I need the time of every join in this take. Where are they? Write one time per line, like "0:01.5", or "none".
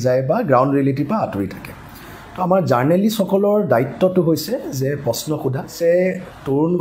0:05.7

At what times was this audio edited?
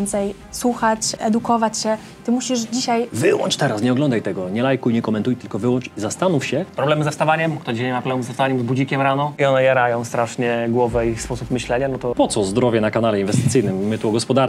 0:01.1
0:03.1
0:06.7
0:09.3
0:12.1

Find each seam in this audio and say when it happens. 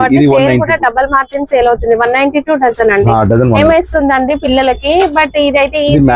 0:03.6

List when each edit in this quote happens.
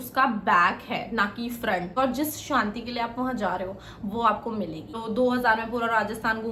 0:02.0
0:05.0

